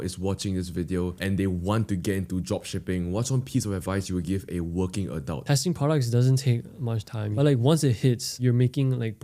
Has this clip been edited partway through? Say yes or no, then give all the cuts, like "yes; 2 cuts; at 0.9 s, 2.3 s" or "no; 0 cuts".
yes; 3 cuts; at 1.1 s, 5.4 s, 8.4 s